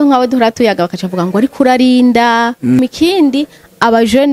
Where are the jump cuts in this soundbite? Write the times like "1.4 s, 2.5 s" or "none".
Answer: 2.8 s